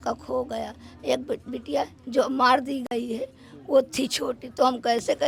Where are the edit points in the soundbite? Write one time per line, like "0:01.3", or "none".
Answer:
none